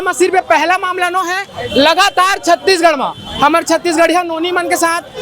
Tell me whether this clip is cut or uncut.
uncut